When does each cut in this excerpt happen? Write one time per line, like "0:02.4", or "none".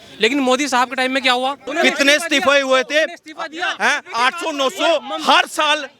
0:01.7